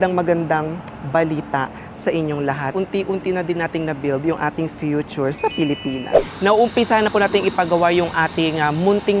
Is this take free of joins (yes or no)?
no